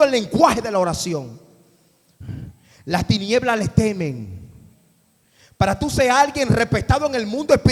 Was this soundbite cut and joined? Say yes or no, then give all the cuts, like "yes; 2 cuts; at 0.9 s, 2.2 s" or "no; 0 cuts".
no; 0 cuts